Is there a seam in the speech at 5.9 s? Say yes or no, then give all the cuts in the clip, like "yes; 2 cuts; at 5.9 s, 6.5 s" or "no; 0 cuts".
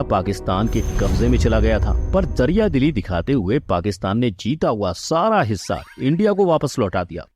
no; 0 cuts